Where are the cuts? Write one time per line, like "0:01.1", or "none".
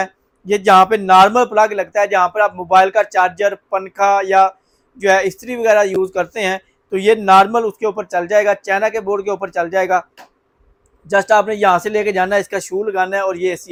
none